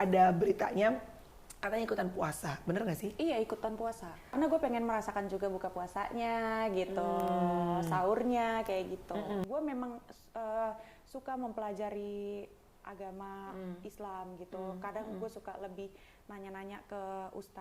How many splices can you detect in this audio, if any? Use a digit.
2